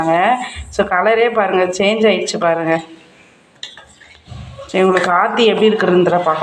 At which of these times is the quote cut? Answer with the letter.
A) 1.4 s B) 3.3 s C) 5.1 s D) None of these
D